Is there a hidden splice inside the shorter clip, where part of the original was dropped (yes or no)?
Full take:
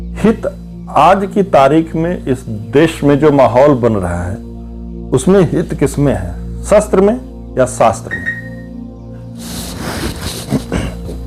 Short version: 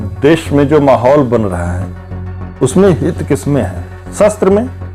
no